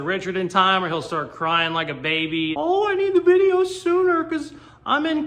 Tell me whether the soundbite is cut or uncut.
cut